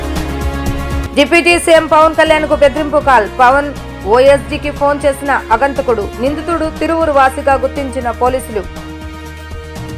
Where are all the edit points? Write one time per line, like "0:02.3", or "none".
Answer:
0:01.0